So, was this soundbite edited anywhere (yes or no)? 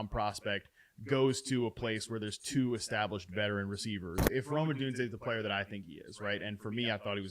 yes